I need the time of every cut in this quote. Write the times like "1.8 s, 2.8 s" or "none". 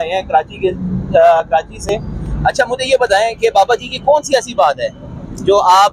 none